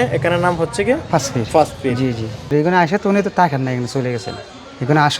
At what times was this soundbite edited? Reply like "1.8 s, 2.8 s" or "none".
2.4 s